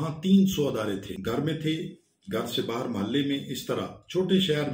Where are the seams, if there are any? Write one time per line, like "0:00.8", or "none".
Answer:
0:01.1